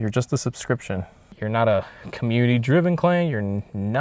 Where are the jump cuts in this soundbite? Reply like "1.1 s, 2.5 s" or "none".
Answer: 1.2 s